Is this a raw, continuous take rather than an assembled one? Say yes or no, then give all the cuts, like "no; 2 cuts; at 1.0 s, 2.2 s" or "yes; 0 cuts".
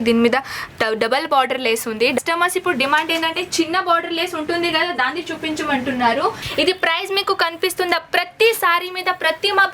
no; 2 cuts; at 2.2 s, 6.4 s